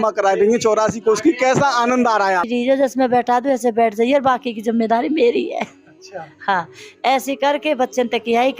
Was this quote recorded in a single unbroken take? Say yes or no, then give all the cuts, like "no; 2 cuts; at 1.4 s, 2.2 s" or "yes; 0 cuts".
no; 1 cut; at 2.5 s